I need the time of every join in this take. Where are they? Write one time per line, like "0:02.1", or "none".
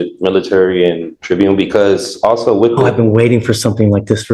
0:01.1